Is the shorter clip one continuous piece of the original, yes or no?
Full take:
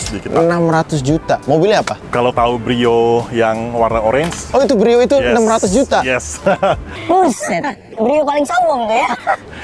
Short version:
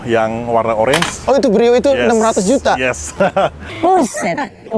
yes